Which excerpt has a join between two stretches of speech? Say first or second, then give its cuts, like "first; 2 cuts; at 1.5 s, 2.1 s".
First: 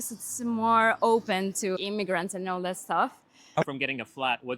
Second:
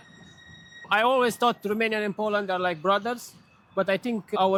first; 1 cut; at 3.3 s